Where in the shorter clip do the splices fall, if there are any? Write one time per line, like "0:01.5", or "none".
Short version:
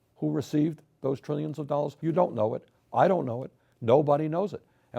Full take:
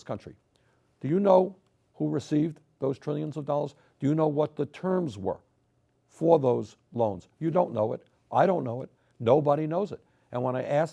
0:01.9

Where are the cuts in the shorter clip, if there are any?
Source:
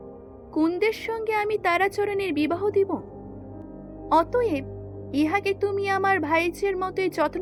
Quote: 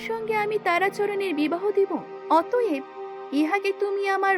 0:02.1

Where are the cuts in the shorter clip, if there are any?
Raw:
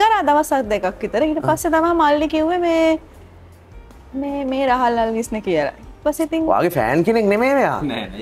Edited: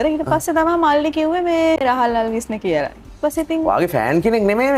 0:01.8

